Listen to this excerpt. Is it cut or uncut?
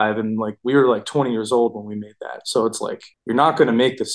cut